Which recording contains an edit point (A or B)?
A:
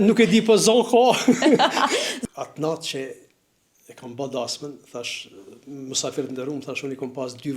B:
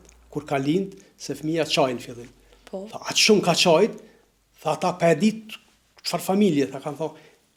A